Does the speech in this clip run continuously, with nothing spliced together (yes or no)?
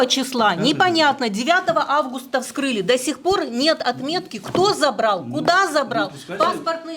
yes